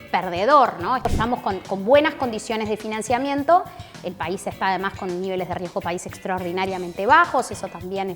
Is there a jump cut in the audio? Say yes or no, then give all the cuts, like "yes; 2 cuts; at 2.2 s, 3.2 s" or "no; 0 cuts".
yes; 1 cut; at 1.1 s